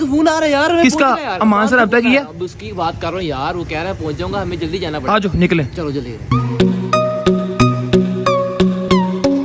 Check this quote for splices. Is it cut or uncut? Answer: uncut